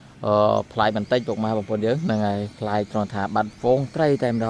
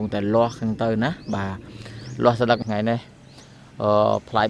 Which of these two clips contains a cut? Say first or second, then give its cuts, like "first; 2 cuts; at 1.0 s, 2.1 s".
second; 1 cut; at 2.6 s